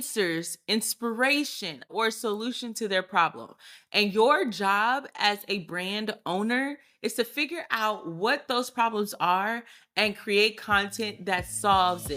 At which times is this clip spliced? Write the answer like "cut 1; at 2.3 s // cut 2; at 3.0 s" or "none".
none

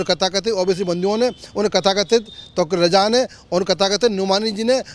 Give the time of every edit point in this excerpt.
none

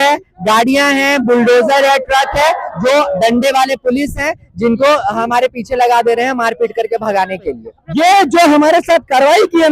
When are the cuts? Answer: cut 1; at 7.7 s

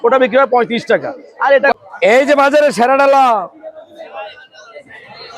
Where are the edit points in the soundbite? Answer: cut 1; at 1.7 s

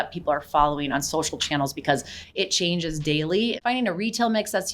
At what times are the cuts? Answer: cut 1; at 3.6 s

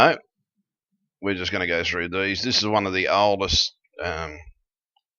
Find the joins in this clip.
cut 1; at 1.7 s

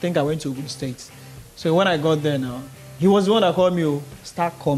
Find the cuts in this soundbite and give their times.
none

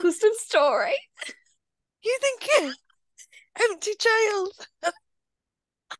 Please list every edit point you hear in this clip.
none

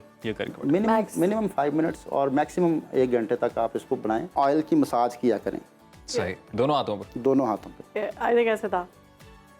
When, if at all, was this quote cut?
cut 1; at 4.3 s

